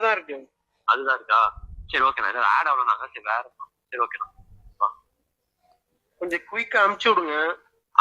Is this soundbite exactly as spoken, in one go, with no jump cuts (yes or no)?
yes